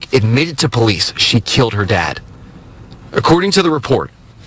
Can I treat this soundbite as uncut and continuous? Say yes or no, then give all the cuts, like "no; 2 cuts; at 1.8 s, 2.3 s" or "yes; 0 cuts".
yes; 0 cuts